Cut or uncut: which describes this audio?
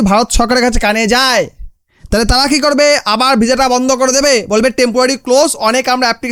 uncut